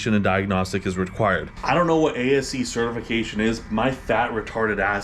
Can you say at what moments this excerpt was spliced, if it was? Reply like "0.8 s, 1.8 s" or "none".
1.5 s